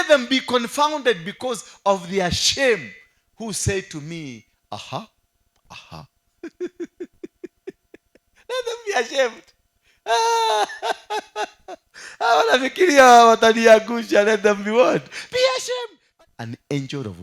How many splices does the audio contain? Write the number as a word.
one